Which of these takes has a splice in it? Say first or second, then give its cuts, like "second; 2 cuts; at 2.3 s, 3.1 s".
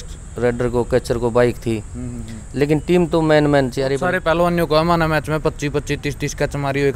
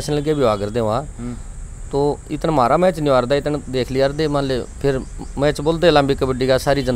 first; 1 cut; at 4.1 s